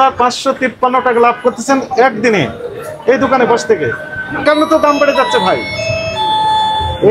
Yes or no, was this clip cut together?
yes